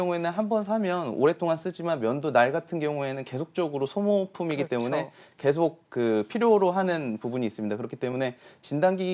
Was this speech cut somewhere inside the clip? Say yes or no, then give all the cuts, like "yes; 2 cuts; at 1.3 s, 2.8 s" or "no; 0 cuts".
no; 0 cuts